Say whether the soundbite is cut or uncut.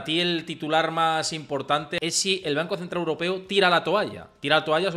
cut